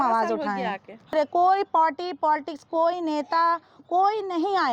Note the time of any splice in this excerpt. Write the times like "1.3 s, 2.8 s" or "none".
1.1 s